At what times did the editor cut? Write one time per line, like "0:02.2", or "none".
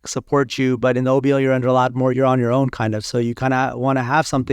0:02.1

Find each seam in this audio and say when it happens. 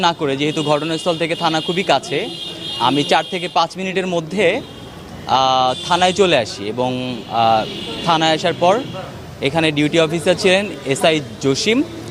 none

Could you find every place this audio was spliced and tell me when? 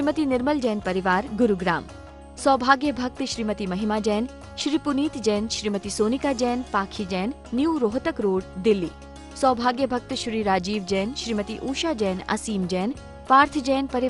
none

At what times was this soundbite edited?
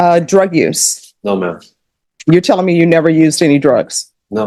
none

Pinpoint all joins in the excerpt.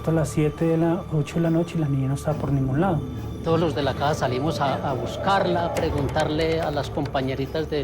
0:03.3

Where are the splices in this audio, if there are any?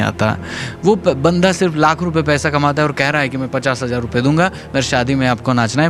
none

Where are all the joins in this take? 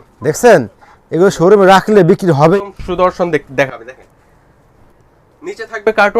0:02.5

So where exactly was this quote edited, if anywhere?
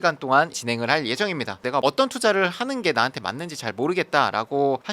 0:01.6

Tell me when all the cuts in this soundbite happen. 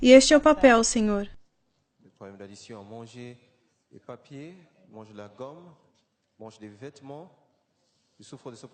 0:01.2

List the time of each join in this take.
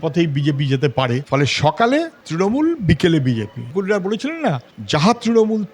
0:03.6

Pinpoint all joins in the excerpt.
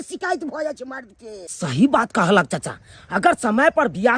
0:01.5

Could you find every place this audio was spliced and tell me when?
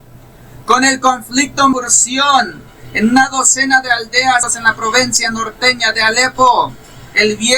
0:01.7
0:04.5

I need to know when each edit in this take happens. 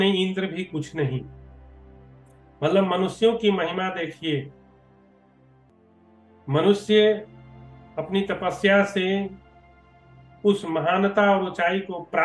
0:04.5
0:06.5

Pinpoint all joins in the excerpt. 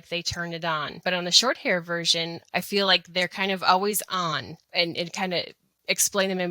0:01.0
0:02.4
0:04.6

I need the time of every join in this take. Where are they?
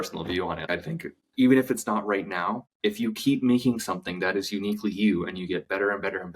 0:00.9
0:02.6

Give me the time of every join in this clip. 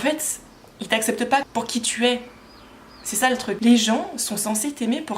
0:01.4
0:03.6

